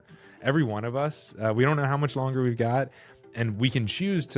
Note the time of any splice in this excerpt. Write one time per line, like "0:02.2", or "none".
none